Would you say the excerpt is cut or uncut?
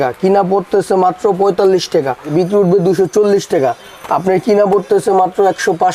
cut